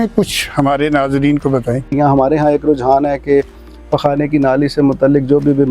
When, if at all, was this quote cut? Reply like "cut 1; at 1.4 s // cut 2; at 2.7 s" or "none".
cut 1; at 1.9 s